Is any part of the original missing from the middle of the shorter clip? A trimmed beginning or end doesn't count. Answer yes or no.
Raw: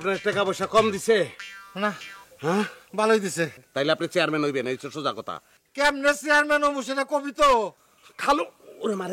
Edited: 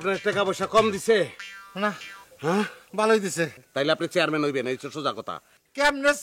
no